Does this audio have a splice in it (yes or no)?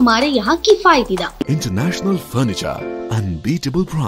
yes